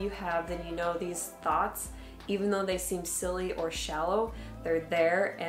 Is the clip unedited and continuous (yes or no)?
yes